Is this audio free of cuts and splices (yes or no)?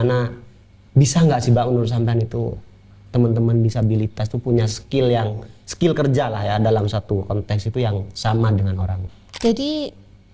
no